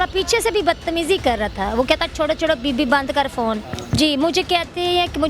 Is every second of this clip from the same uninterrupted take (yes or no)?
no